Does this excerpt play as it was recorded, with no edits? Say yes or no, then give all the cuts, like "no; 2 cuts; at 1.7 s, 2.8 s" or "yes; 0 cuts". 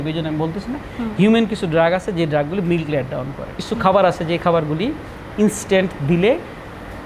no; 1 cut; at 3.5 s